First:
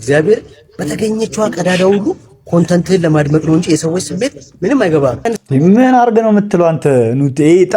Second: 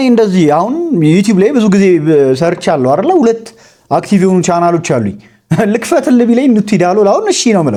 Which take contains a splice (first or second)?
first